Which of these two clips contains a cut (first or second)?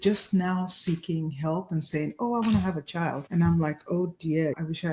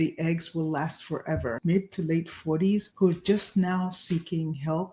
second